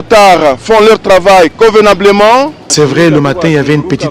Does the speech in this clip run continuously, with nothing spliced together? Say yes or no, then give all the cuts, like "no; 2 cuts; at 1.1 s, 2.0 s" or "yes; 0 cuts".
no; 1 cut; at 2.7 s